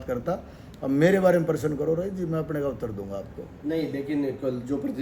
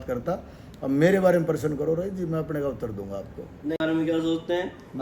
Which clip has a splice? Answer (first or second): second